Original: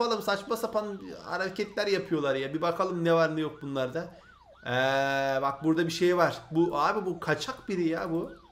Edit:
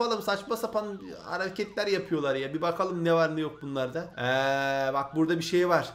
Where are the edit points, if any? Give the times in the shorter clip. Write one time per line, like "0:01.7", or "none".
0:04.1